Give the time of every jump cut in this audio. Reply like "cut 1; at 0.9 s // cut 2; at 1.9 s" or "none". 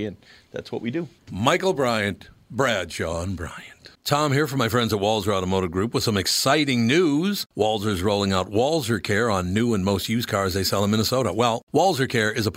cut 1; at 3.9 s